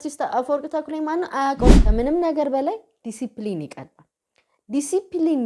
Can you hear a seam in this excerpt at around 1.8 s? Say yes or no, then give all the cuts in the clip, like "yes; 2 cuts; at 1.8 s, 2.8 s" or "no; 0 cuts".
yes; 1 cut; at 1.8 s